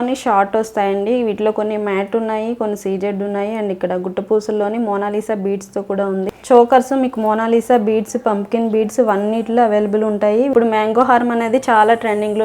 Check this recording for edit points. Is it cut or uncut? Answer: cut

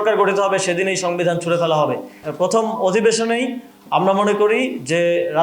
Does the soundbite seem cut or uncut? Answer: cut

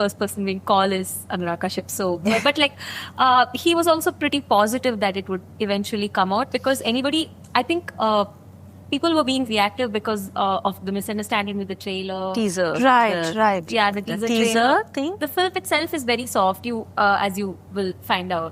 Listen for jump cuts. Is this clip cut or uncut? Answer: uncut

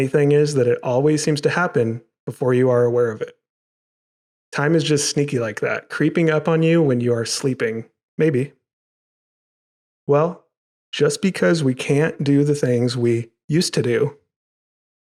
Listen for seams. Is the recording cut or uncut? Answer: uncut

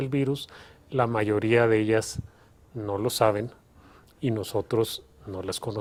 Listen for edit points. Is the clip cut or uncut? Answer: uncut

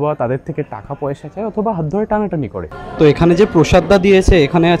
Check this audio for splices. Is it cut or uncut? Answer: cut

